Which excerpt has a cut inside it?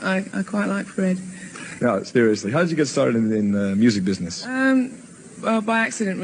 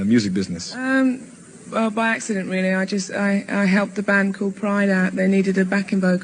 second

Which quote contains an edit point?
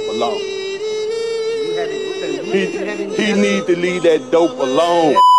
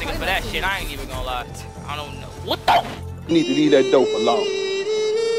second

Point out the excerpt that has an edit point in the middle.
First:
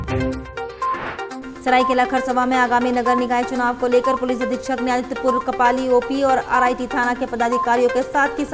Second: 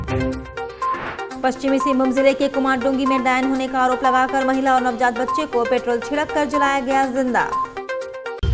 first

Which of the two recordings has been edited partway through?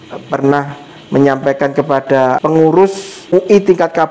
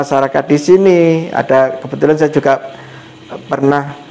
first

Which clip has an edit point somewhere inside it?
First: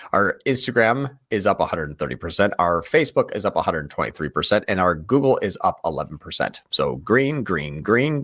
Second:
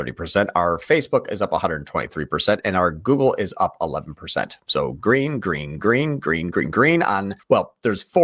second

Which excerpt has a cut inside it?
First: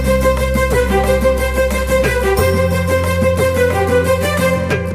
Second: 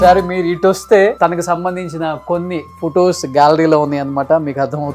second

